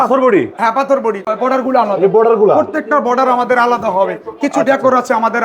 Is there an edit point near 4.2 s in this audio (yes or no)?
no